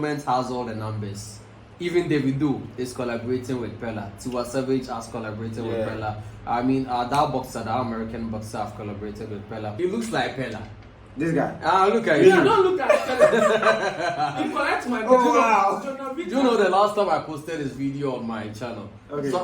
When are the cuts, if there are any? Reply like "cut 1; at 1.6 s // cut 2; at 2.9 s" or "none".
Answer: cut 1; at 9.7 s